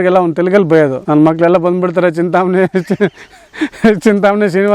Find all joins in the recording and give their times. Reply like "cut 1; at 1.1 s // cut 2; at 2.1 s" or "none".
cut 1; at 1.0 s